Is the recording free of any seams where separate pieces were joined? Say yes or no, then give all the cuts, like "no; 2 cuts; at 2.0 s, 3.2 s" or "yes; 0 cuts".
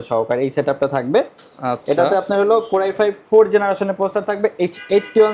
yes; 0 cuts